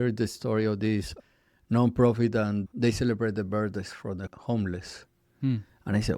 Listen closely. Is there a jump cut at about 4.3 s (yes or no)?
yes